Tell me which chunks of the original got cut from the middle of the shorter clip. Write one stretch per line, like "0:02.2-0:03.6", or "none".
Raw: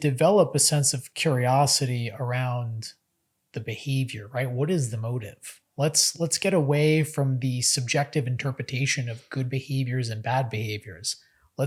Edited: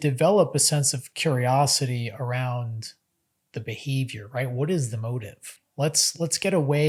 none

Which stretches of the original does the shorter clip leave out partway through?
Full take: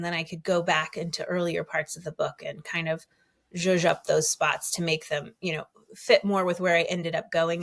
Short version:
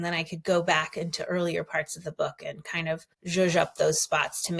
0:03.1-0:03.4

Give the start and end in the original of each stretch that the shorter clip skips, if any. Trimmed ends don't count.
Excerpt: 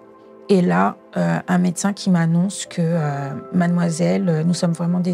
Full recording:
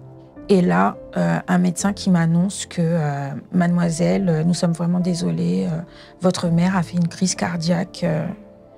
none

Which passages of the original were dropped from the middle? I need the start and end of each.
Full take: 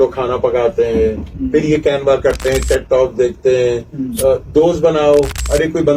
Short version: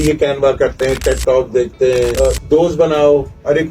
0:03.8-0:04.2

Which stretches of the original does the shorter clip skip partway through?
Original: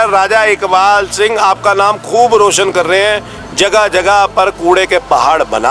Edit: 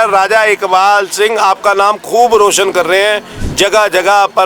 none

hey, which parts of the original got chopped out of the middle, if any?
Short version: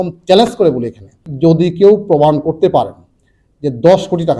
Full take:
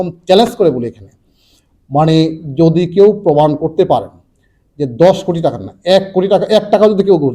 0:01.3-0:02.4

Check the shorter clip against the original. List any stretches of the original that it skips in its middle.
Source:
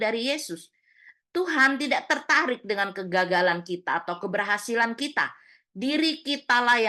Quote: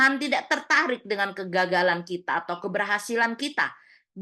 none

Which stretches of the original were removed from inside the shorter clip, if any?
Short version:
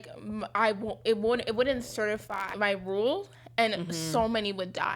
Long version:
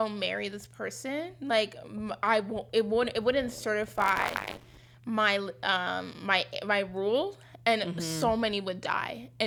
0:04.1-0:06.5

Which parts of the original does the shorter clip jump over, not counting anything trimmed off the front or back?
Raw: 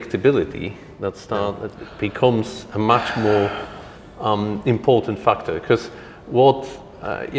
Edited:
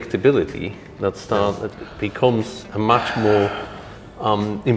none

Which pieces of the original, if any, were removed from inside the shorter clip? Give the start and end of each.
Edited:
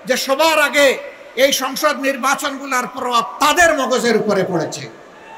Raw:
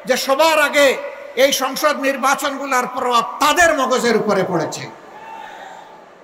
none

